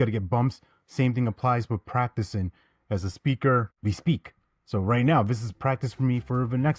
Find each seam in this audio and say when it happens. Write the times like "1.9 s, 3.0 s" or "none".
3.7 s